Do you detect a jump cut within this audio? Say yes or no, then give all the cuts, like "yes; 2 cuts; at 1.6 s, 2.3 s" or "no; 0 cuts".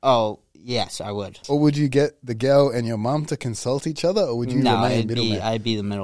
yes; 1 cut; at 1.3 s